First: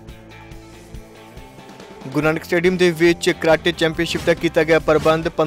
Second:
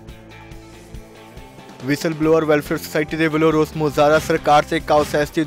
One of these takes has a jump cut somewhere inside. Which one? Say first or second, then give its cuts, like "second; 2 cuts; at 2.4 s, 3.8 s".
second; 1 cut; at 1.6 s